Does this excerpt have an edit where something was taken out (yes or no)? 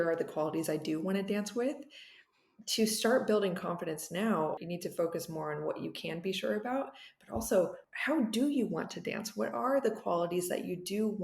yes